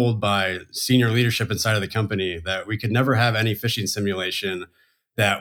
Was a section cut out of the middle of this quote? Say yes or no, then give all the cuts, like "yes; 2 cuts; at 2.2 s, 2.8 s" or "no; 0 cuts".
no; 0 cuts